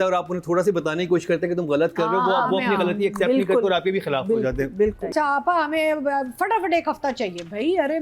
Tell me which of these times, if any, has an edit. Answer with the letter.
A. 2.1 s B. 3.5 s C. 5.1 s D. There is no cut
C